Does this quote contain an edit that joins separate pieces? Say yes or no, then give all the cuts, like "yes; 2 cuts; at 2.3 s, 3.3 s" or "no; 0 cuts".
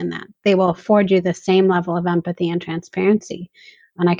no; 0 cuts